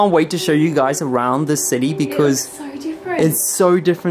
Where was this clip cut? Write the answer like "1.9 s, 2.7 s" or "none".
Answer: none